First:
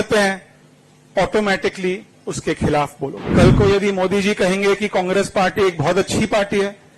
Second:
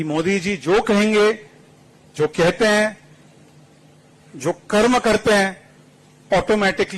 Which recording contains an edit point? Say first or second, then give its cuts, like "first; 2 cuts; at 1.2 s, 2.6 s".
first; 1 cut; at 3.2 s